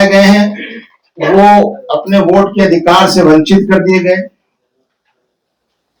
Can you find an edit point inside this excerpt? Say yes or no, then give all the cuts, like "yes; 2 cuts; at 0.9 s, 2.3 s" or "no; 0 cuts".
no; 0 cuts